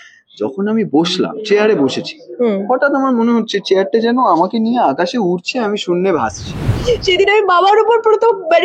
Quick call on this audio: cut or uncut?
cut